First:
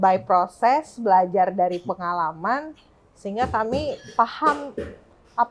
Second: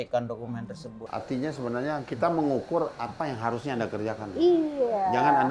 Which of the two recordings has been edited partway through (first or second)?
second